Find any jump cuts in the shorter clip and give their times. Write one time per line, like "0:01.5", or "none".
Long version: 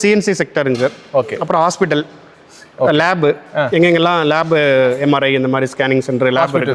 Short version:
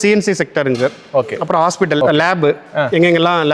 0:02.0